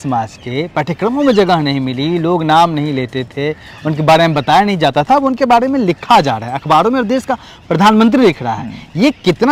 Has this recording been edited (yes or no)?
no